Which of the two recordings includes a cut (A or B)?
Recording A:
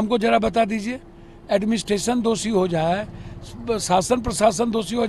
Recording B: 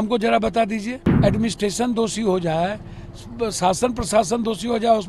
B